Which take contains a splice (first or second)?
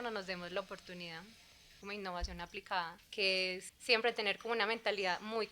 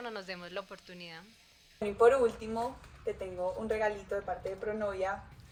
first